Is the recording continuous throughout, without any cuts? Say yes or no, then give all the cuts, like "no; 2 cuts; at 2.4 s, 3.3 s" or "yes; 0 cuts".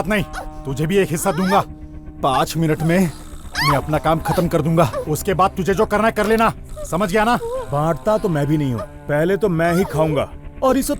yes; 0 cuts